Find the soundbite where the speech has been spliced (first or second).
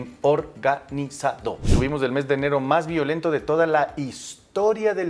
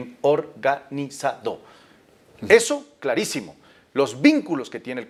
first